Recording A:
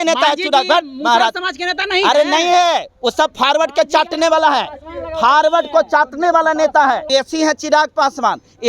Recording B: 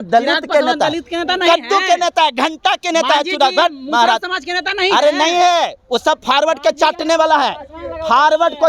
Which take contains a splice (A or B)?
A